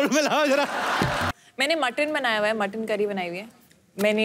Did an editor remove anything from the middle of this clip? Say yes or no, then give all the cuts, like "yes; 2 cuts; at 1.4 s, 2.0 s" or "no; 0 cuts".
yes; 1 cut; at 1.3 s